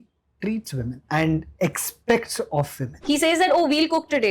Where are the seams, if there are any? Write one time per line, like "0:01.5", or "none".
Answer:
0:01.0
0:02.8